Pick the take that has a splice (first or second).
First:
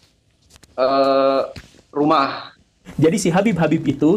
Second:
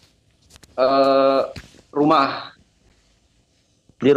first